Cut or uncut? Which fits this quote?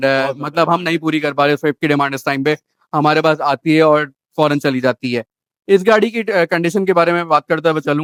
uncut